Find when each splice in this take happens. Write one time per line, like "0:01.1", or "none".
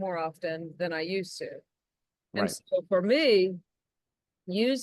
none